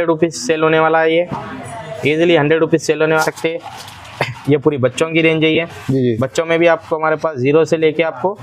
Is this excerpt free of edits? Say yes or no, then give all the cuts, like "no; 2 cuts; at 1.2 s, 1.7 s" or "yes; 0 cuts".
no; 1 cut; at 3.2 s